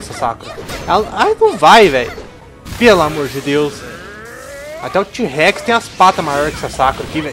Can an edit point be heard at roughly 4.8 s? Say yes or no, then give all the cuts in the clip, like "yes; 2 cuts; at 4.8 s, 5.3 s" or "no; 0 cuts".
no; 0 cuts